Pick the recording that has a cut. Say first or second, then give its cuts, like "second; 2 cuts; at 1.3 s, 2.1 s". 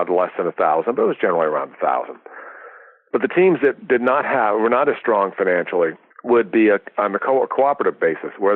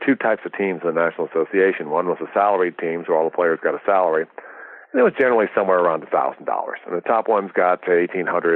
first; 1 cut; at 6.1 s